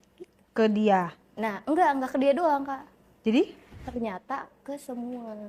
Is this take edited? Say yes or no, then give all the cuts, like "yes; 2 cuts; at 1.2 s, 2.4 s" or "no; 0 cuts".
yes; 1 cut; at 3.8 s